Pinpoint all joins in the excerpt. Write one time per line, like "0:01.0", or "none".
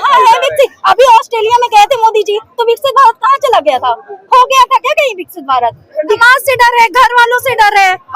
0:06.2